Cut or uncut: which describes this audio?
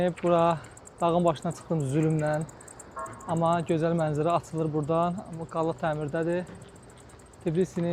uncut